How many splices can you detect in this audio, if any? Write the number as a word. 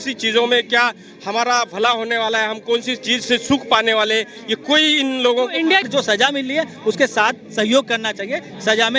one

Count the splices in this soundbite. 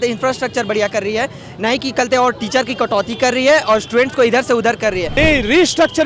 one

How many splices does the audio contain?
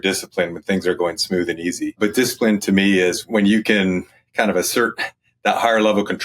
two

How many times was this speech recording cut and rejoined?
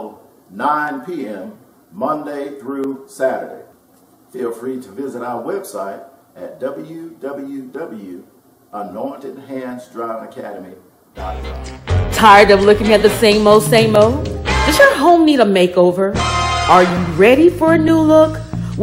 one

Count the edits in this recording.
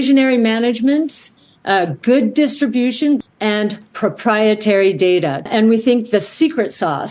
two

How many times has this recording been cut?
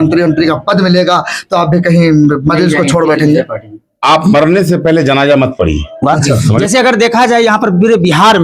one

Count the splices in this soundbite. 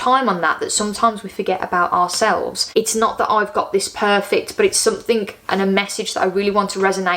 one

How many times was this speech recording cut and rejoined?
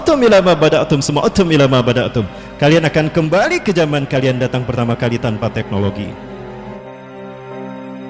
one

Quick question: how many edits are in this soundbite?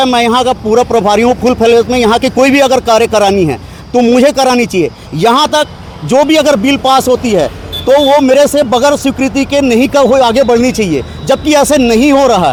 zero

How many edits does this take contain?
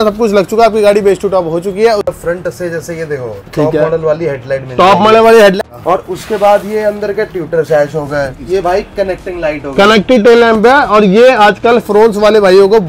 three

